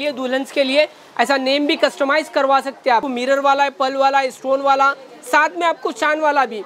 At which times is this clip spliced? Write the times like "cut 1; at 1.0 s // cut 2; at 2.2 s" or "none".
cut 1; at 3.1 s